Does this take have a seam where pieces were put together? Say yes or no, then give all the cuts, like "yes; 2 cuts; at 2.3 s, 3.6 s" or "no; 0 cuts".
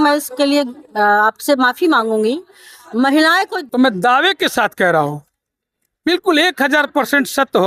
yes; 1 cut; at 3.6 s